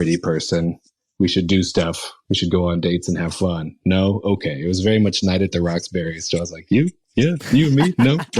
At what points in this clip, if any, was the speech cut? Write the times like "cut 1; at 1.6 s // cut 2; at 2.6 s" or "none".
cut 1; at 1.0 s